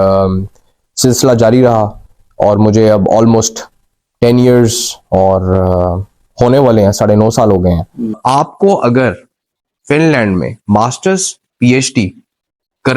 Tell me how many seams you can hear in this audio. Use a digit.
1